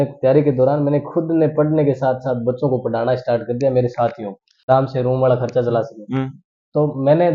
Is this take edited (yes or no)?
yes